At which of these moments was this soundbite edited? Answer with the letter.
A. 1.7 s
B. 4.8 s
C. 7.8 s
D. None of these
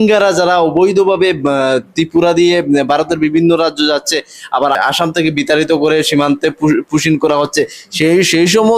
B